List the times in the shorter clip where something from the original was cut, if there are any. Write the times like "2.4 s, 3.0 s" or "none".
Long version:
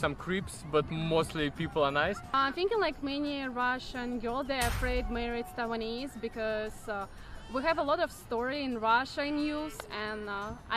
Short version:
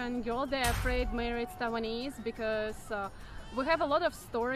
none